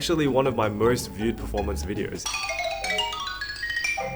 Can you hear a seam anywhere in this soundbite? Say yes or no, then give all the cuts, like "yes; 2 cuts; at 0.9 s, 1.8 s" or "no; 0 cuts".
yes; 1 cut; at 2.2 s